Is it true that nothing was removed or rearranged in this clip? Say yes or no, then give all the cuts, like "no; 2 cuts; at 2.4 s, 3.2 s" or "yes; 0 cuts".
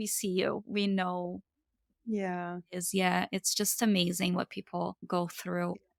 yes; 0 cuts